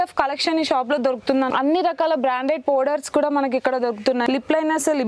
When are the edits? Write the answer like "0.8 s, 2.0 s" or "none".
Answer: 1.5 s, 4.2 s